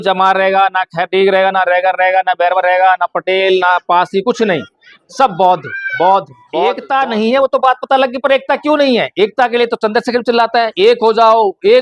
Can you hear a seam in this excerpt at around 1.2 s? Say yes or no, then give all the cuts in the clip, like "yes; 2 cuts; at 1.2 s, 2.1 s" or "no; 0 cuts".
no; 1 cut; at 6.8 s